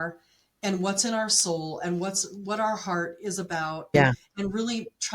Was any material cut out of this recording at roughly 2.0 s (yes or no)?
no